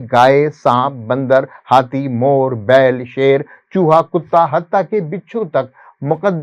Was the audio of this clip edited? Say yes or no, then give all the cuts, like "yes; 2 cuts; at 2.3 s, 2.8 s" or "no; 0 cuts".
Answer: no; 0 cuts